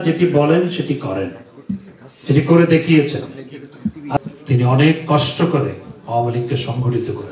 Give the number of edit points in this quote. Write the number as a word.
one